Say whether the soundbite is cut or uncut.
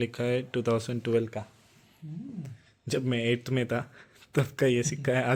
uncut